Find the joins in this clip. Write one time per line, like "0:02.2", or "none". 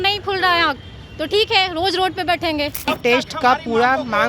0:02.9